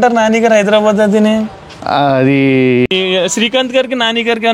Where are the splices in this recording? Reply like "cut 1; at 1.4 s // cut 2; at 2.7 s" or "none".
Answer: cut 1; at 2.9 s